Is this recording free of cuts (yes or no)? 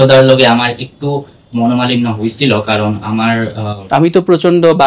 yes